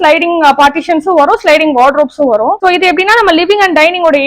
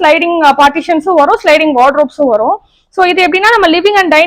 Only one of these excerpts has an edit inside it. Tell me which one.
first; 1 cut; at 2.6 s

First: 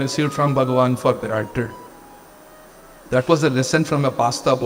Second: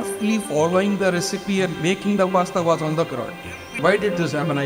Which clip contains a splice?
second; 1 cut; at 3.7 s

